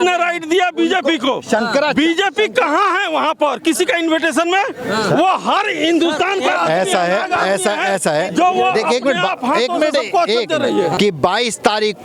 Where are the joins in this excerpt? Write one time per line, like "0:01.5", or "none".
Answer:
0:11.0